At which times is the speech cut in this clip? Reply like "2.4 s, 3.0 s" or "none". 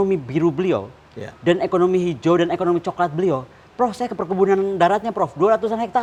none